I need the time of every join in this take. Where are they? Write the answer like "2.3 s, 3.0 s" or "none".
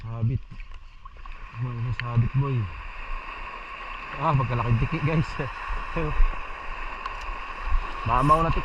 none